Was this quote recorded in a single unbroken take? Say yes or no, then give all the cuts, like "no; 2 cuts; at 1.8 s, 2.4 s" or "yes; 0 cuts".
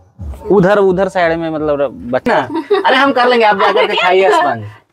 no; 1 cut; at 2.3 s